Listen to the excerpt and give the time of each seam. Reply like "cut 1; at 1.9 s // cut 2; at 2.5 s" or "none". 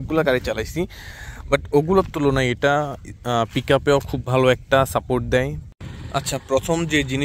cut 1; at 5.6 s

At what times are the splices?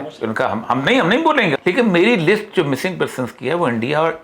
cut 1; at 1.6 s

